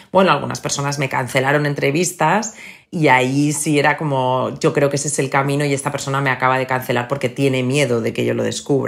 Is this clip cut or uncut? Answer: uncut